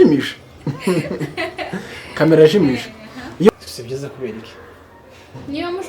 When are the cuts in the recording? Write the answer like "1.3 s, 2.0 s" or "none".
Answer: 3.5 s